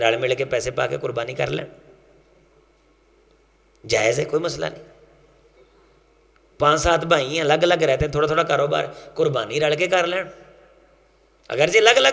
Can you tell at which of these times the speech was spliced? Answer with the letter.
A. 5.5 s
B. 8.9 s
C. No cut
C